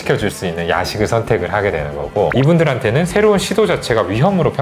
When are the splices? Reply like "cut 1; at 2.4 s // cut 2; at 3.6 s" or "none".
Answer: cut 1; at 2.3 s